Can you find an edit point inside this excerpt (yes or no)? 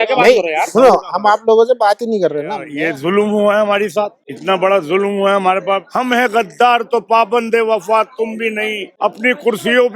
yes